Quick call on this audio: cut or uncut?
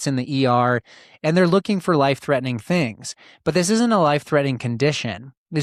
uncut